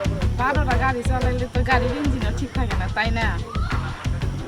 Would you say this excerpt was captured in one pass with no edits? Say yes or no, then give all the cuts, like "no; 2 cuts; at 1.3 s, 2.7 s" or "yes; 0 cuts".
yes; 0 cuts